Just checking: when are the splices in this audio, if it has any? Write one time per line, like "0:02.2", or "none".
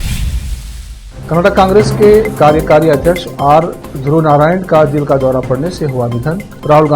0:00.9